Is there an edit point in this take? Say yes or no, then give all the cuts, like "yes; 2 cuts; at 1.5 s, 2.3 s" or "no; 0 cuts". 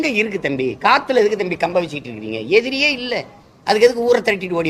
no; 0 cuts